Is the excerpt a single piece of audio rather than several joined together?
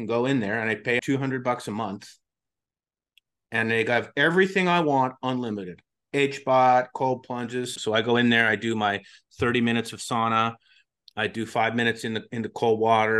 no; 2 cuts; at 1.0 s, 7.7 s

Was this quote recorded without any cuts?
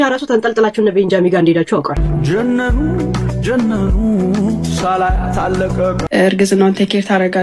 no; 2 cuts; at 2.0 s, 6.0 s

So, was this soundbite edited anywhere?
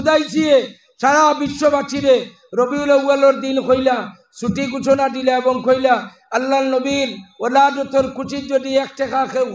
no; 0 cuts

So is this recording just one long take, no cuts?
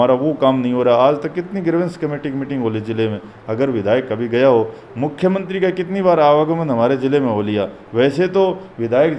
yes; 0 cuts

